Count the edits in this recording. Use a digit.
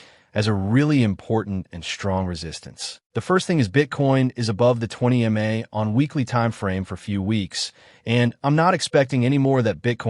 1